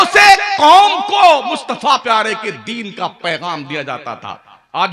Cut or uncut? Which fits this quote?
uncut